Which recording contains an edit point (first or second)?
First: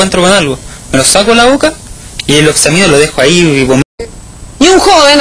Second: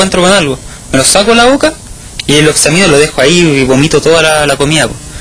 second